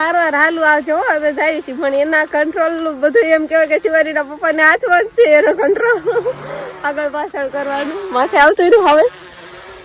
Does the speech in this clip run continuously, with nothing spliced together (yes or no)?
yes